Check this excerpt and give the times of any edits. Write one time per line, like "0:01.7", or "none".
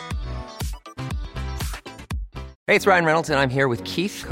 0:02.5